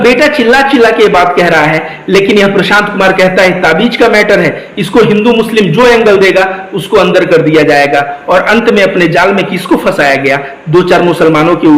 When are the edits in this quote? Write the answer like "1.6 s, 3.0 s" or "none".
none